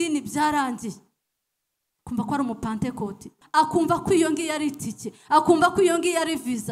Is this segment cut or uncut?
cut